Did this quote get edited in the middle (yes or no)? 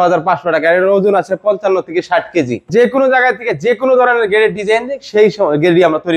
yes